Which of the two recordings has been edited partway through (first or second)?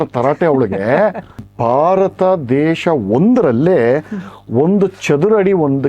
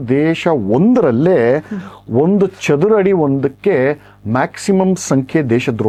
first